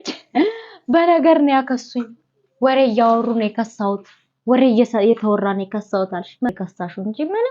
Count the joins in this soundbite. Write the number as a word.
one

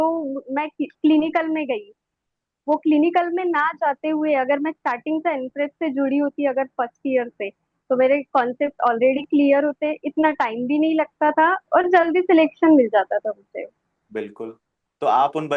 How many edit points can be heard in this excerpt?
zero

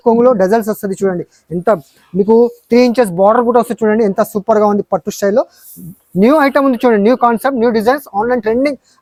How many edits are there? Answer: zero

